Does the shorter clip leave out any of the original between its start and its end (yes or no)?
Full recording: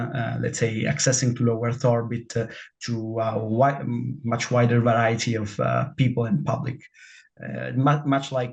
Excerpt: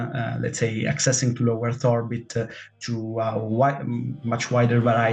no